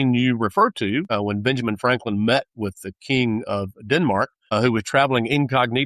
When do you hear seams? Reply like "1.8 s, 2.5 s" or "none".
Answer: 1.1 s, 4.4 s